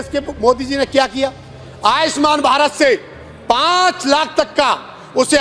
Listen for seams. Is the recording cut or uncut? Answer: uncut